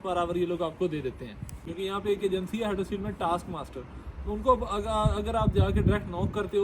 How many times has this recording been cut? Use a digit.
1